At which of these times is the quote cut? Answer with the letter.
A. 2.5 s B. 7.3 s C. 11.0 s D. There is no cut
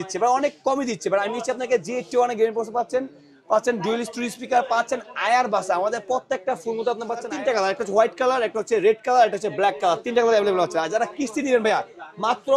B